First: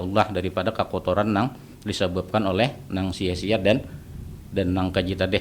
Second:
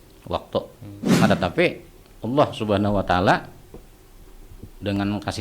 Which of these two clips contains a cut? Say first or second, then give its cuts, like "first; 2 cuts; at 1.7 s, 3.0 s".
second; 1 cut; at 1.1 s